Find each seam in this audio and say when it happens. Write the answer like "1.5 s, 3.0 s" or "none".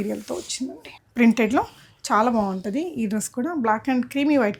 none